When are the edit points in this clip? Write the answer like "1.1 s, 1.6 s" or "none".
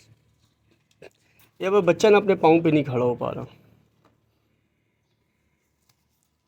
none